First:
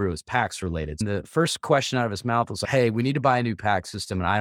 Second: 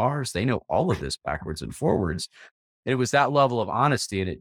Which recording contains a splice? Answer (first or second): first